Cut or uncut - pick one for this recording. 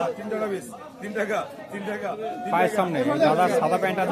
uncut